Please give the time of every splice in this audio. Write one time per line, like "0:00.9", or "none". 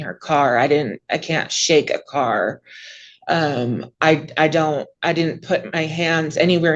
none